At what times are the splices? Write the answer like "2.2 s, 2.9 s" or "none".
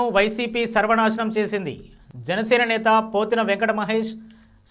none